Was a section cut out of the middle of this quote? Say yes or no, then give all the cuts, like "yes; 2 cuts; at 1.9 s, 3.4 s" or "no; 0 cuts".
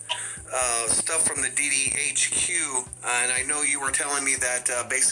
no; 0 cuts